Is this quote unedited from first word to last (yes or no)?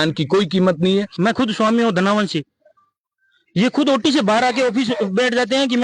no